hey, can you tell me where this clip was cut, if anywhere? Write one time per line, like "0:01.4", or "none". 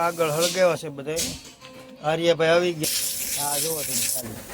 0:02.8